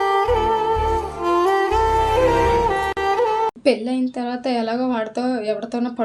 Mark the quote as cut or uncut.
uncut